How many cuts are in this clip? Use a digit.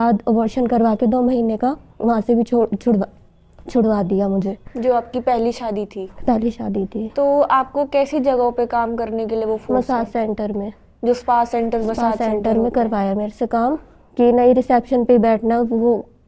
0